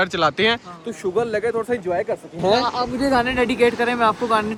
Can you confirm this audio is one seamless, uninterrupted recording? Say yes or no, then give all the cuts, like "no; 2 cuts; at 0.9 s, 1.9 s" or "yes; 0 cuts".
yes; 0 cuts